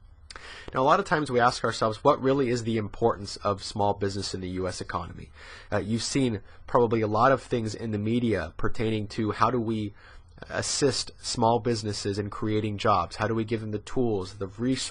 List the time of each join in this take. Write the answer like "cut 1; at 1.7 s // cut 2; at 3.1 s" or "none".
cut 1; at 6.9 s